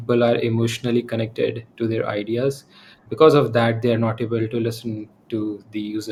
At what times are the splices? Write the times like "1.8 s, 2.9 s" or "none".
none